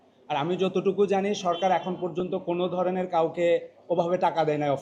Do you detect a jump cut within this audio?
no; 0 cuts

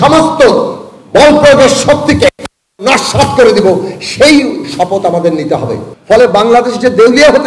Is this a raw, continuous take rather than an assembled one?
no; 1 cut; at 5.9 s

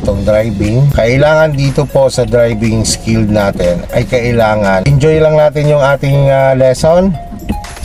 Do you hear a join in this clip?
yes; 2 cuts; at 0.9 s, 4.9 s

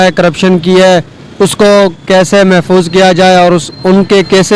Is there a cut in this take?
no; 0 cuts

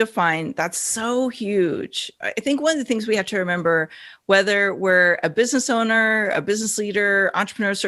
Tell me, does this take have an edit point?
yes; 1 cut; at 2.0 s

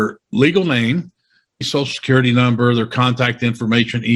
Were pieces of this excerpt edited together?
yes; 1 cut; at 1.7 s

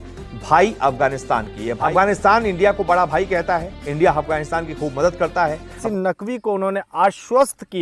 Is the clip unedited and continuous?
no; 2 cuts; at 1.7 s, 5.7 s

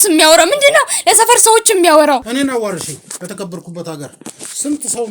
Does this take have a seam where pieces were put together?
yes; 1 cut; at 2.3 s

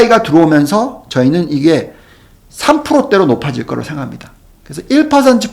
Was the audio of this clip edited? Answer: no; 0 cuts

